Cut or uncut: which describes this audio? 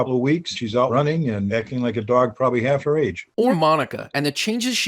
uncut